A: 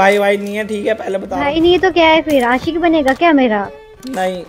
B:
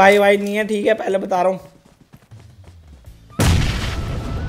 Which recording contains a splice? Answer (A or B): A